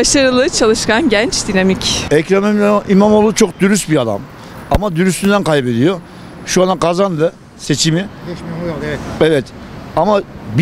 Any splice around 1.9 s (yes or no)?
yes